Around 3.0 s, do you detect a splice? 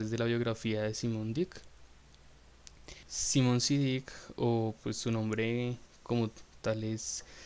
yes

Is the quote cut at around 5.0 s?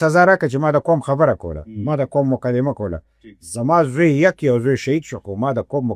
no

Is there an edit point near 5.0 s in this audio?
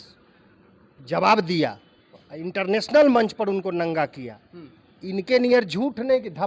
no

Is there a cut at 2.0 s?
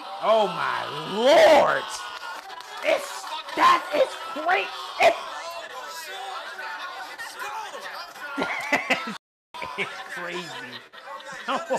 no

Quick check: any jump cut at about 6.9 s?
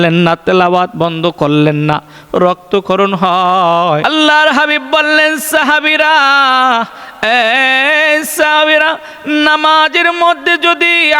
no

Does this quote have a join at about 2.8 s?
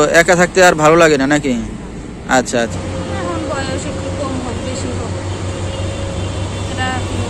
yes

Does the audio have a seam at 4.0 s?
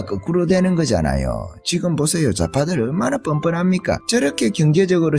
yes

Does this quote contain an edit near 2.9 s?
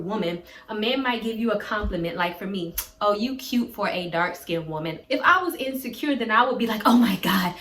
no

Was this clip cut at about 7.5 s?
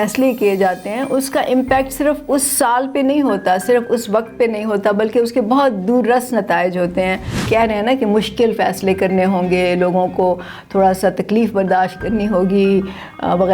yes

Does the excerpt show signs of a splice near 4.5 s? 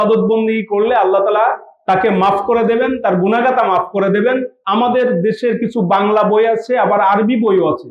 yes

